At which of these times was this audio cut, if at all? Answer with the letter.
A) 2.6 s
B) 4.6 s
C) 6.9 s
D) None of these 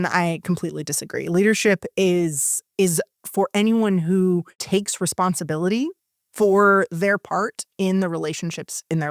B